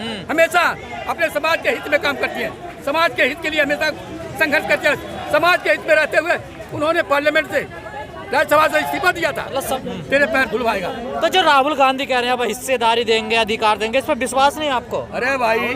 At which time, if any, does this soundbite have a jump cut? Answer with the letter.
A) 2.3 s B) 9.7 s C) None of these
B